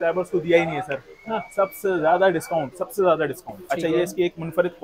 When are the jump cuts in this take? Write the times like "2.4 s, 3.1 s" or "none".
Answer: 3.5 s